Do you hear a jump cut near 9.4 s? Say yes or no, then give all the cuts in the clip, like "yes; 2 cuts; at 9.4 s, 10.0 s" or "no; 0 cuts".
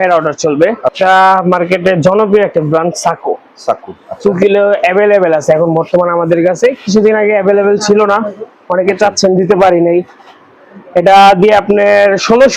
no; 1 cut; at 0.9 s